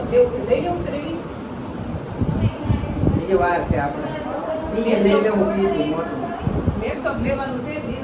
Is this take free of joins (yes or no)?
yes